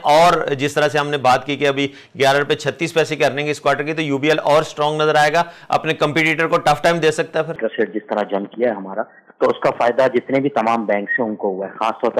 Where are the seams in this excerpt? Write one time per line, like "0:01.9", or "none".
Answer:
0:07.6